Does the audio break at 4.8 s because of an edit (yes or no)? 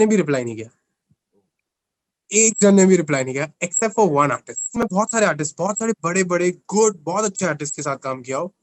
yes